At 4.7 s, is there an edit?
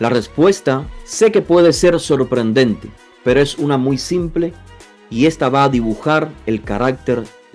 no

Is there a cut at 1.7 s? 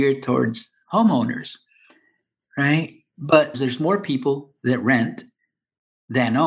no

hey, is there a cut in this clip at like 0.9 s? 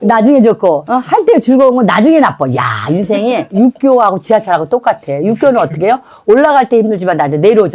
yes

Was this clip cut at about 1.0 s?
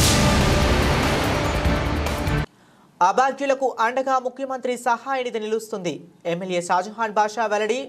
no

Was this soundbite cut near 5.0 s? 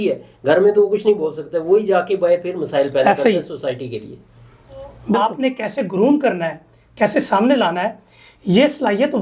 yes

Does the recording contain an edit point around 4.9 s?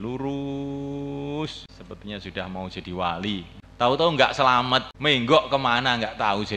yes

